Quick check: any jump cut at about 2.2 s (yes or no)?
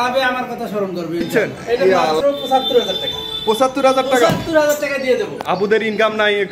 yes